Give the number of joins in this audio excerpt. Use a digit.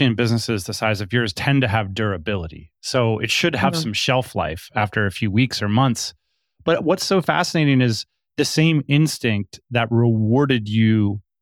0